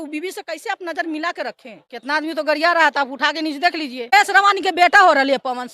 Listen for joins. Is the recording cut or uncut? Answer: cut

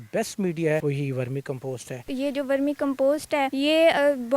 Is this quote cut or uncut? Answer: cut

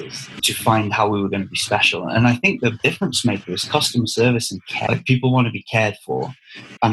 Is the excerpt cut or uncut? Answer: cut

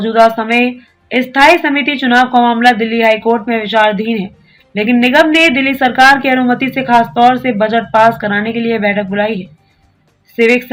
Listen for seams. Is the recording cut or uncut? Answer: uncut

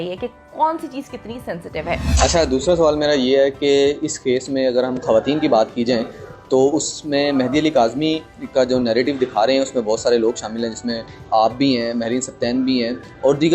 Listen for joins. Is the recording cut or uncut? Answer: uncut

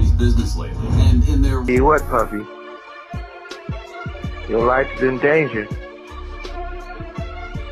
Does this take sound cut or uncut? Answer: cut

